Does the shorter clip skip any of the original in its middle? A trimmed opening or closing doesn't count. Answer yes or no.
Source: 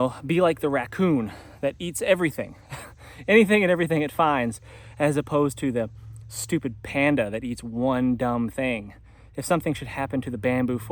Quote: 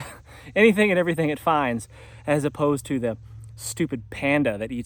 no